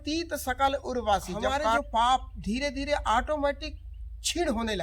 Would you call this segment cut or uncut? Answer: cut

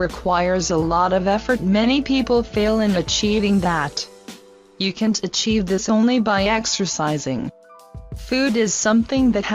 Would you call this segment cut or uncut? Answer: cut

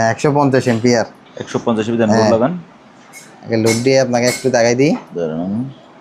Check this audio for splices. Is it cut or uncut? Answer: uncut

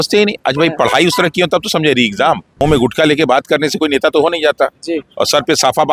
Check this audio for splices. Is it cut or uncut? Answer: cut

